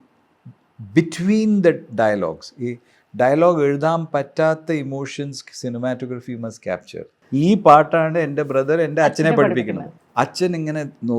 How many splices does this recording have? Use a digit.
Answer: 2